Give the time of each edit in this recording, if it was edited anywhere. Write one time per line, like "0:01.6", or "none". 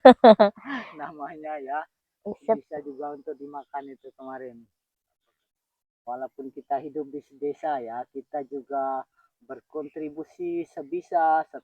0:05.3